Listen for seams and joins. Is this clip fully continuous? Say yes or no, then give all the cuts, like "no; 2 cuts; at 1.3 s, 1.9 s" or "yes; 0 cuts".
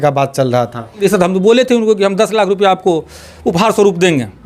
no; 1 cut; at 1.0 s